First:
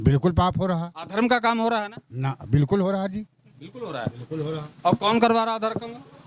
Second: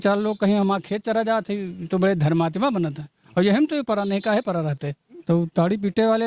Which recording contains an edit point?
second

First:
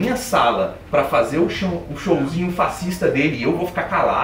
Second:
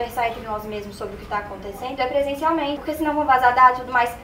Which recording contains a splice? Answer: second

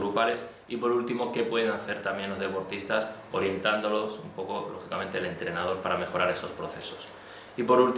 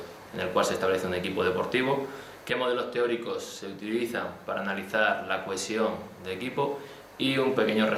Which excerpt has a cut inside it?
first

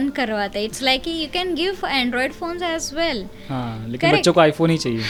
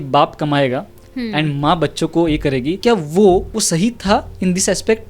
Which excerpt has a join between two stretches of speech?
second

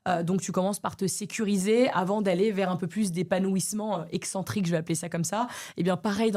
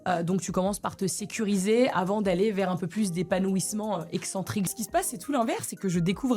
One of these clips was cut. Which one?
second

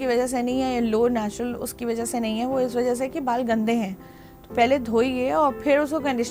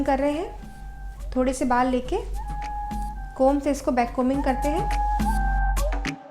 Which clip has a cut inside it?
second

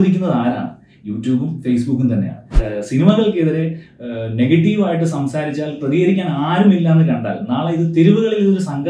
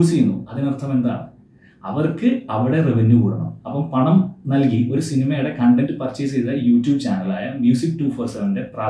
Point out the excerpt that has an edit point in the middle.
first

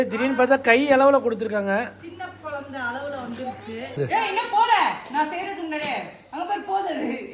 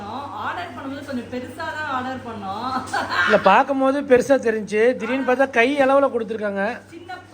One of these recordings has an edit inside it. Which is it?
first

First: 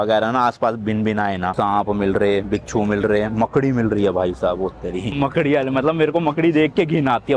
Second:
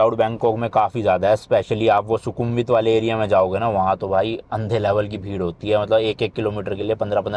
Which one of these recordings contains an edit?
first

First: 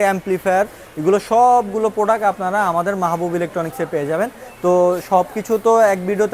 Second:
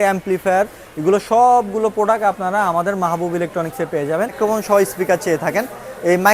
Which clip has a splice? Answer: second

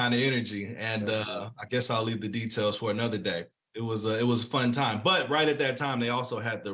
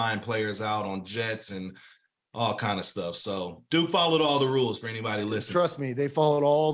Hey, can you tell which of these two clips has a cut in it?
first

